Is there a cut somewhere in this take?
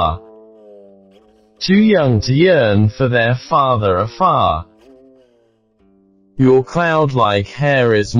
yes; 1 cut; at 6.4 s

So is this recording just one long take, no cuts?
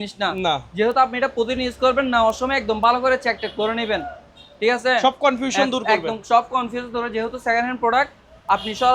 yes; 0 cuts

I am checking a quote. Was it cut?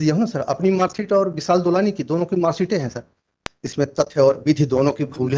yes; 1 cut; at 3.4 s

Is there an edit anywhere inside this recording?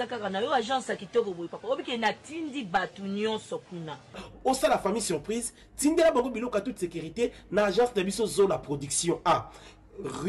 no; 0 cuts

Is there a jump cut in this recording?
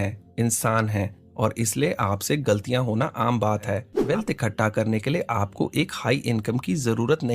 yes; 1 cut; at 3.9 s

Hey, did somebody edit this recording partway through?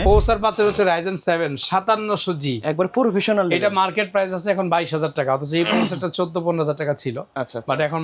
no; 0 cuts

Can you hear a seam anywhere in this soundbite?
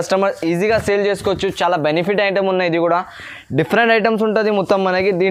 no; 0 cuts

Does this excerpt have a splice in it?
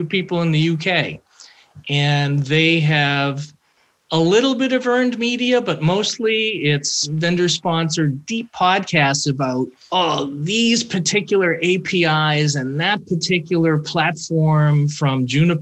yes; 2 cuts; at 7.0 s, 9.8 s

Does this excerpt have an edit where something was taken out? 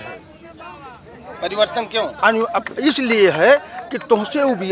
no; 0 cuts

